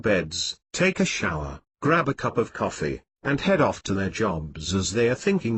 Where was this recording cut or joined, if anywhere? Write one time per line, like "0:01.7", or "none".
0:01.5